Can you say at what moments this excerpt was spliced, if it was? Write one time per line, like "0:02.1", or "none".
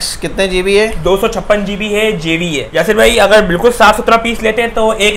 0:02.6

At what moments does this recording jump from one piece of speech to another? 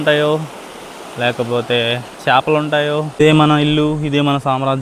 0:03.2

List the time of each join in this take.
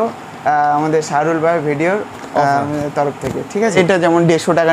0:03.8

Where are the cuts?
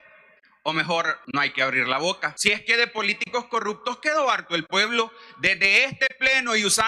0:01.2
0:02.3

